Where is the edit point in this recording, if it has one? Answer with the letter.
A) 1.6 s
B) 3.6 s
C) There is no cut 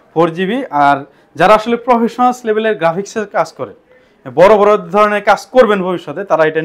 C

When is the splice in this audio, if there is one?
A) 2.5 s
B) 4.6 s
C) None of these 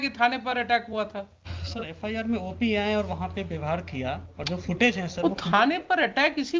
C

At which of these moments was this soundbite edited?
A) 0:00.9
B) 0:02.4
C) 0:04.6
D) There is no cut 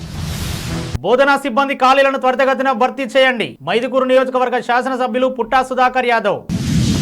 A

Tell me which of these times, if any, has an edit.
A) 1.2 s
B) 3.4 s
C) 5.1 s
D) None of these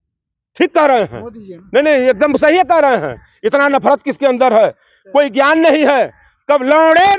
D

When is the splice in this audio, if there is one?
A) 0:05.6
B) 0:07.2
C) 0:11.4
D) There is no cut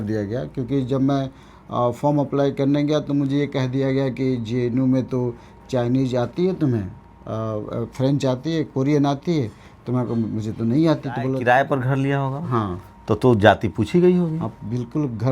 C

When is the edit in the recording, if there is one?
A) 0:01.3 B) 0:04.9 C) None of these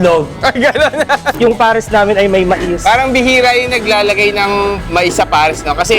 A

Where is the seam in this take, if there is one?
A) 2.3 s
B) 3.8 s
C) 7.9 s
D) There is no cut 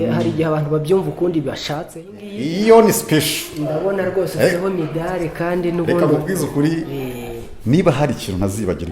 A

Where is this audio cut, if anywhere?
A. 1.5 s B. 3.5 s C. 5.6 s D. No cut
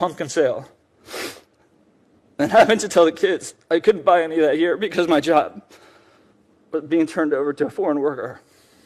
D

